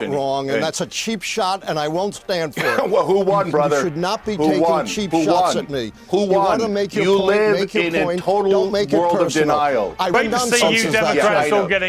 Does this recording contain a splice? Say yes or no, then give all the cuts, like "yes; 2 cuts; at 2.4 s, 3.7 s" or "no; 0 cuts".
yes; 2 cuts; at 6.2 s, 10.1 s